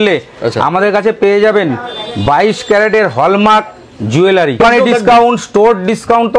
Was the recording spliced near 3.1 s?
no; 1 cut; at 4.6 s

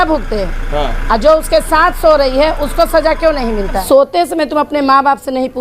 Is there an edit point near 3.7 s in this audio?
yes; 1 cut; at 3.7 s

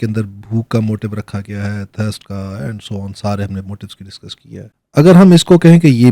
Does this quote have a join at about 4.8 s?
yes; 1 cut; at 4.8 s

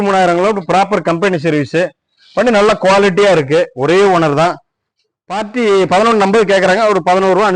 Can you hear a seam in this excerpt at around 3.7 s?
no; 0 cuts

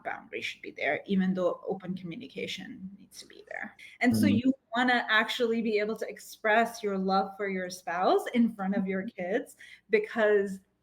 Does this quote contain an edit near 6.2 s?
no; 1 cut; at 3.7 s

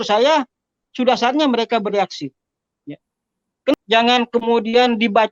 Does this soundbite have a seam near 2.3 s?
no; 1 cut; at 3.7 s

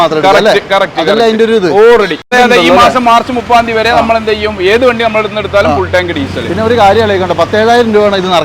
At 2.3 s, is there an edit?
yes; 1 cut; at 2.3 s

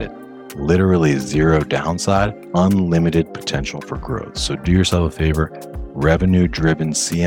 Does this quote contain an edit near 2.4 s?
yes; 1 cut; at 2.4 s

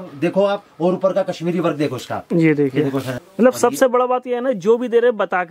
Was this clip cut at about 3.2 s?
yes; 1 cut; at 3.2 s

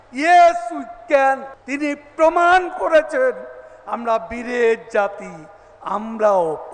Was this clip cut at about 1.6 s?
yes; 1 cut; at 1.6 s

